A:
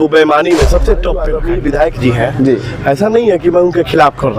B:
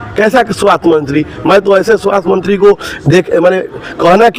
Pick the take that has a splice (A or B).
A